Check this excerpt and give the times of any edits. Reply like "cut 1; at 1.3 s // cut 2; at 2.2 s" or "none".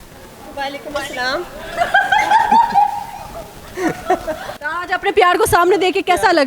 cut 1; at 4.5 s